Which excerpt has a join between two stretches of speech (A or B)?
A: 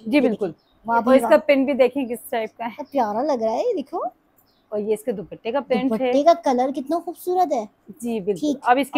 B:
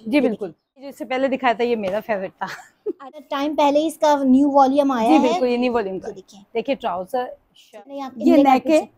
B